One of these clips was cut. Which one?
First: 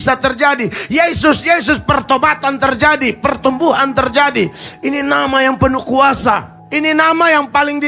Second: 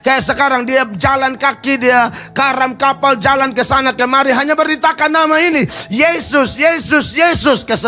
first; 1 cut; at 6.6 s

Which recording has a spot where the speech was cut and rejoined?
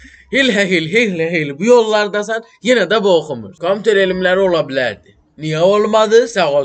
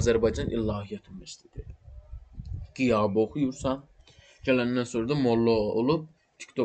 first; 1 cut; at 3.4 s

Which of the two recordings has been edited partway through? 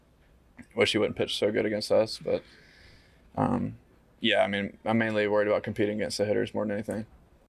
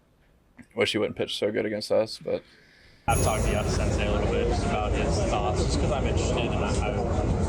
second; 1 cut; at 3.1 s

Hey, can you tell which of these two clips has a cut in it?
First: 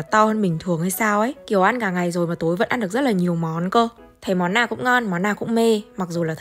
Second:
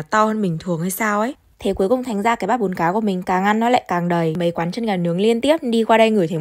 second; 2 cuts; at 1.4 s, 4.4 s

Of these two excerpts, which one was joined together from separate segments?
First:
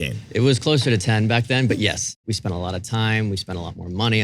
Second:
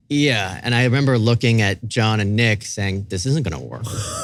first; 1 cut; at 2.1 s

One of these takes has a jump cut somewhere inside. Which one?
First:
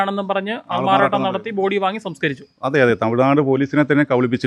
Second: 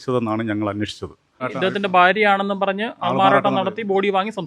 second; 1 cut; at 1.4 s

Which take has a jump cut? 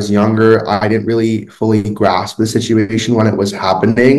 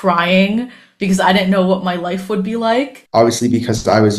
second; 1 cut; at 3.0 s

